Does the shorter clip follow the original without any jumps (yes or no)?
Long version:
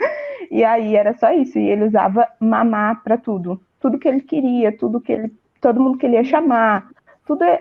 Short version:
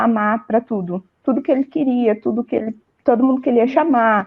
yes